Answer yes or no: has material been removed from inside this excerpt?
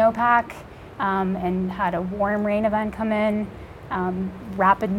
no